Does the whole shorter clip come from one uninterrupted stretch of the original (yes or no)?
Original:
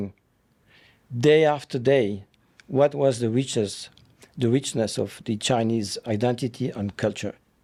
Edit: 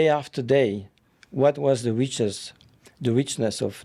yes